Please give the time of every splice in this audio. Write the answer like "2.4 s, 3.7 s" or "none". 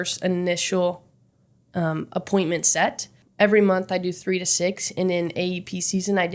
3.2 s